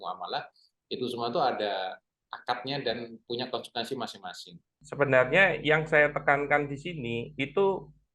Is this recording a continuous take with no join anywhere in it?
no; 1 cut; at 4.8 s

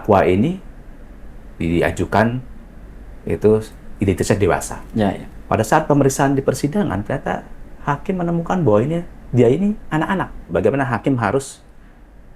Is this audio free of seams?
no; 1 cut; at 10.5 s

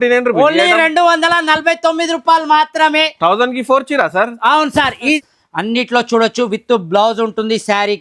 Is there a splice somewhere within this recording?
yes; 1 cut; at 5.2 s

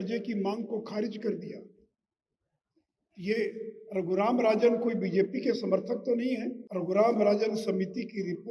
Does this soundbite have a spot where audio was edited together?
yes; 1 cut; at 6.6 s

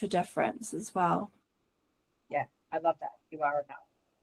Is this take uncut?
yes; 0 cuts

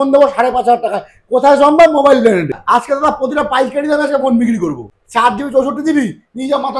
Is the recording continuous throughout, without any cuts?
no; 2 cuts; at 2.6 s, 4.9 s

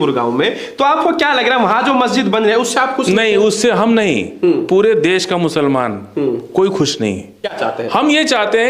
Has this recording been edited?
yes; 1 cut; at 7.5 s

